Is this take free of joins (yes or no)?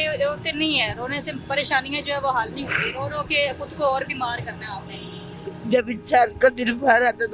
yes